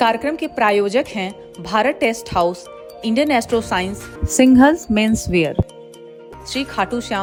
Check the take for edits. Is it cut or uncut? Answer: uncut